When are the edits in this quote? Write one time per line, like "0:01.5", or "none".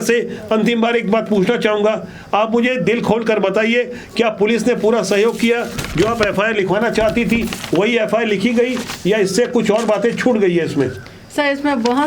none